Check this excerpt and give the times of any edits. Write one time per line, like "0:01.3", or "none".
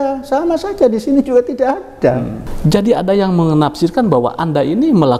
0:02.4

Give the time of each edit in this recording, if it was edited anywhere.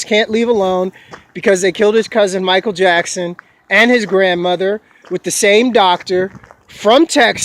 0:03.4

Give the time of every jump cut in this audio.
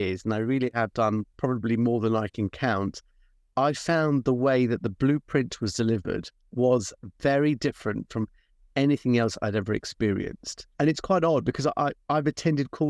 0:01.3
0:06.4
0:10.6

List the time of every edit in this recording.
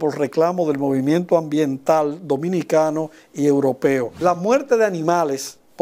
0:04.1

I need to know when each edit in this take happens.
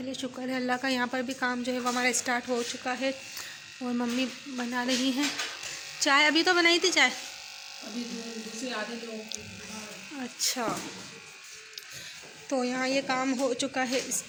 none

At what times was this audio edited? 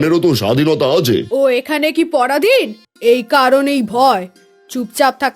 0:01.3
0:02.8

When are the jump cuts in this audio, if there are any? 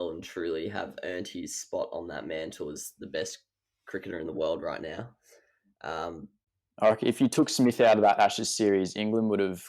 0:06.3

